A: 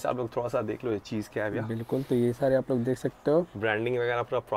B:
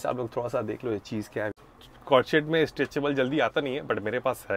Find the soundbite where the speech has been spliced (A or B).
B